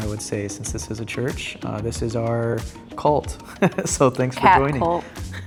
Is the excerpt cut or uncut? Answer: uncut